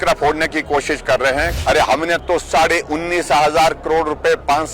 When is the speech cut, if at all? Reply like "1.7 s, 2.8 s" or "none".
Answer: 1.5 s